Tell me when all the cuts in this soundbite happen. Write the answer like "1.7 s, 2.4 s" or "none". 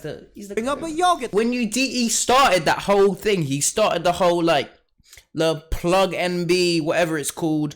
1.3 s